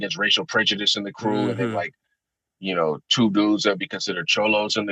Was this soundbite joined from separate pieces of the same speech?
no; 0 cuts

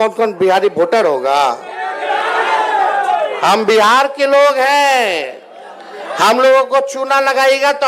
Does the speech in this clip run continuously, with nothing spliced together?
yes; 0 cuts

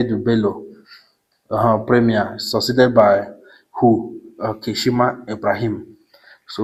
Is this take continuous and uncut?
yes; 0 cuts

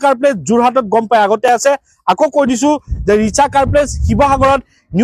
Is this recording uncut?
yes; 0 cuts

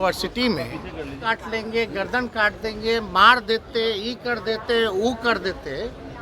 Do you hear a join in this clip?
yes; 1 cut; at 1.2 s

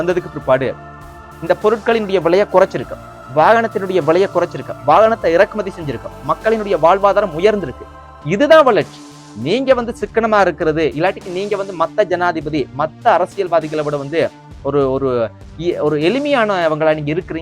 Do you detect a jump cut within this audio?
no; 0 cuts

